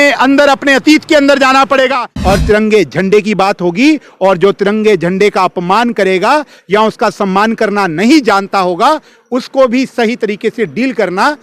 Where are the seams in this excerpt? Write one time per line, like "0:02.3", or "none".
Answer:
0:02.1